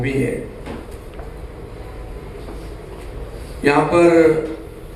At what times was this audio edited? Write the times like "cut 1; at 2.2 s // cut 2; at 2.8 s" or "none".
none